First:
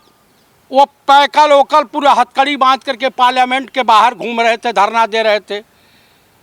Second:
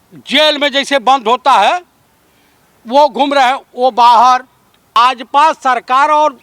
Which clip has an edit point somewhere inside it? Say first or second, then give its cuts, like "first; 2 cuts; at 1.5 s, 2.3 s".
second; 1 cut; at 5.0 s